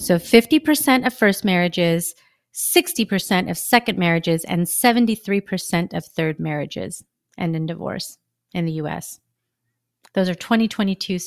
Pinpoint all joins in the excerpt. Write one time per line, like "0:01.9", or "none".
none